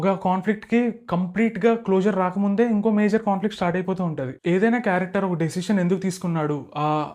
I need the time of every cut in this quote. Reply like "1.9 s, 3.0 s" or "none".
none